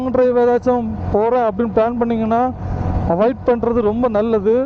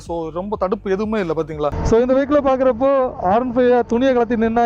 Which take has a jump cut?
second; 1 cut; at 1.8 s

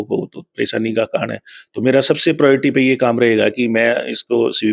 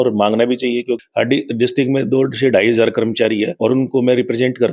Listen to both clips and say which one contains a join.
second; 2 cuts; at 1.0 s, 3.5 s

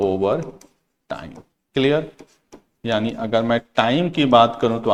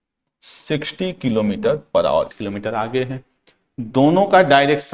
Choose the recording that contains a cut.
second; 1 cut; at 2.4 s

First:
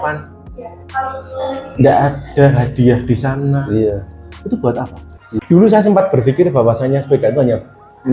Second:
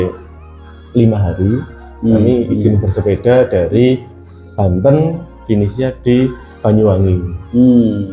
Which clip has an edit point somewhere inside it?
first; 1 cut; at 5.4 s

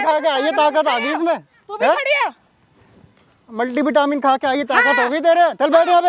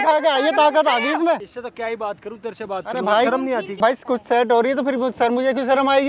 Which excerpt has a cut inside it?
second; 2 cuts; at 1.6 s, 3.7 s

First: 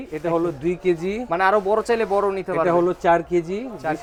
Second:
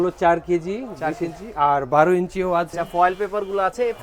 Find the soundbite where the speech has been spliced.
second; 1 cut; at 2.7 s

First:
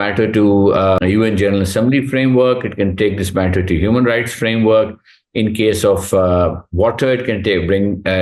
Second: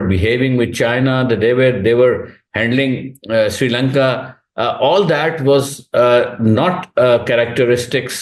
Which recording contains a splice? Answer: first; 1 cut; at 1.0 s

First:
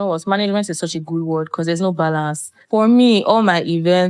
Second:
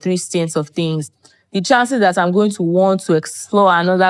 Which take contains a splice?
first; 1 cut; at 2.6 s

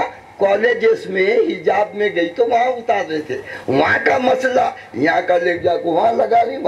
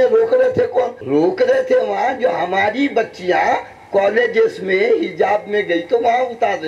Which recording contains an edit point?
second; 1 cut; at 1.0 s

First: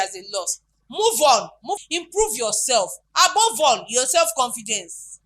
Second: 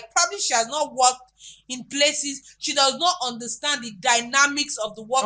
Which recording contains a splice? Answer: first; 1 cut; at 1.8 s

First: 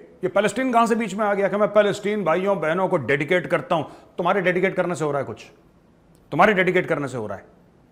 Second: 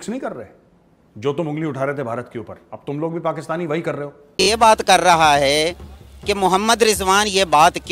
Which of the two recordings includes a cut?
second; 1 cut; at 4.1 s

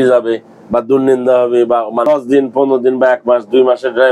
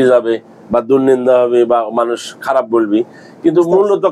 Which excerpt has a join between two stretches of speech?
first; 1 cut; at 2.0 s

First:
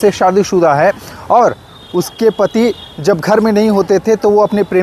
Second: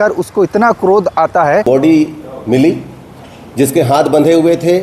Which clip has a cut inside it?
second; 1 cut; at 1.6 s

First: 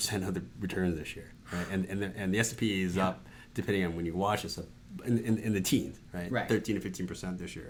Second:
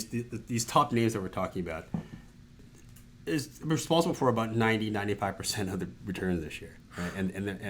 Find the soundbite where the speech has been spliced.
second; 1 cut; at 2.6 s

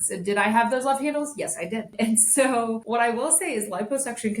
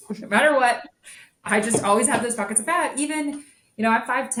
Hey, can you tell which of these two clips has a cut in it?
first; 2 cuts; at 1.9 s, 2.8 s

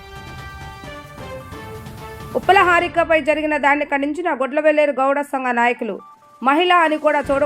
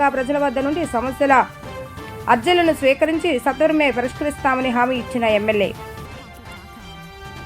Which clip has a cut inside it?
first; 1 cut; at 2.0 s

